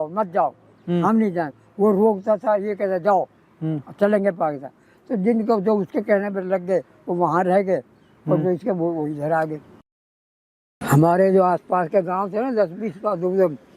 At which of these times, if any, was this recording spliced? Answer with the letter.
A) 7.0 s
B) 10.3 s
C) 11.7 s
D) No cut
B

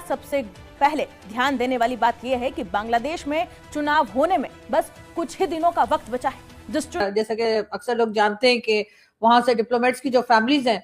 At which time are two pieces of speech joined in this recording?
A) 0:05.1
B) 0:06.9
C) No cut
B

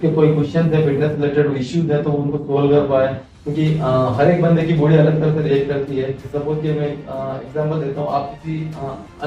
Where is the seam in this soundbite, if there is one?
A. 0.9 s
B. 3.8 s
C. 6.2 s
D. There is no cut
C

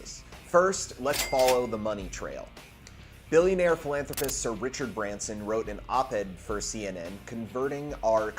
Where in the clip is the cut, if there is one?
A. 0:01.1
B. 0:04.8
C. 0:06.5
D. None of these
D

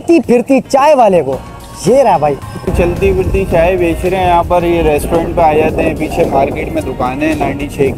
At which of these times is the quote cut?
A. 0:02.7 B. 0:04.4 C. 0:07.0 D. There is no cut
A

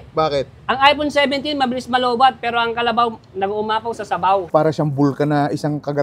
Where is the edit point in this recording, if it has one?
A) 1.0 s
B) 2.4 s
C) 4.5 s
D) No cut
C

